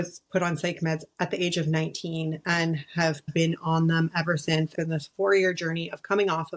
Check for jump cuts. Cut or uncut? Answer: cut